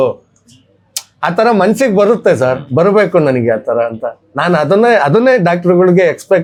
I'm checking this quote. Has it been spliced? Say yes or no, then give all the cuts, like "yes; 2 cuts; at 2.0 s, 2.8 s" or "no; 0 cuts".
no; 0 cuts